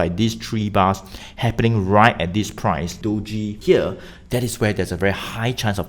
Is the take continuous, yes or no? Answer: no